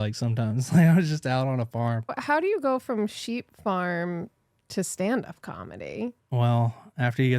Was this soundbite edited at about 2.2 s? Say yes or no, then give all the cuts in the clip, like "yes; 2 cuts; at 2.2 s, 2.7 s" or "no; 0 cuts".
yes; 2 cuts; at 2.2 s, 6.2 s